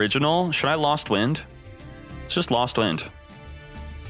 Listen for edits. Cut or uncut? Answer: uncut